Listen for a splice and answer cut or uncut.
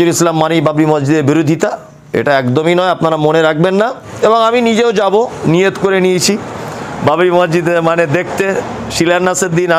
cut